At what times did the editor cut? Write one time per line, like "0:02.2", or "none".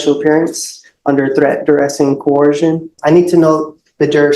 0:02.9